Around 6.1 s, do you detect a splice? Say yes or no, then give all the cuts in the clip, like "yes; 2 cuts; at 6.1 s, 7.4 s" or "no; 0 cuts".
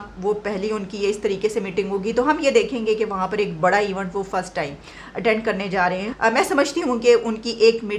yes; 1 cut; at 6.1 s